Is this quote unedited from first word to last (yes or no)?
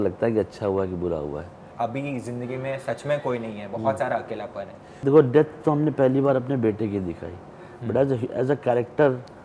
no